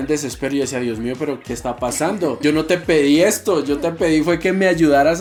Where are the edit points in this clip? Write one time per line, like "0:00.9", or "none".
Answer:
none